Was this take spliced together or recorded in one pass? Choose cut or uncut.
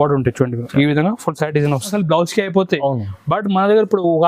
cut